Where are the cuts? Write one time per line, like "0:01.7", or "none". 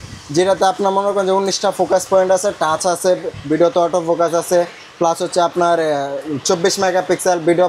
none